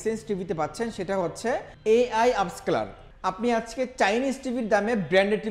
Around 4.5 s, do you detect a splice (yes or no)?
no